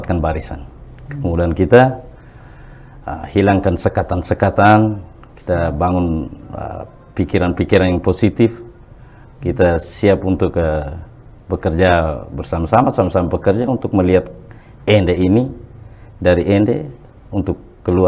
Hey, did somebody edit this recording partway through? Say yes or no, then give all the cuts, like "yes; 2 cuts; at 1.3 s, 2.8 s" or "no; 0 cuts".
no; 0 cuts